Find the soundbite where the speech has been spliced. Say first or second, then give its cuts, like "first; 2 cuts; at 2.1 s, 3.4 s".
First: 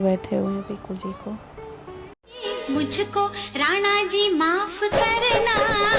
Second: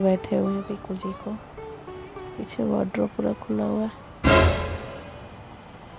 first; 1 cut; at 2.1 s